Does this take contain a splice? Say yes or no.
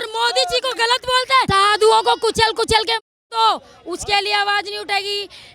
yes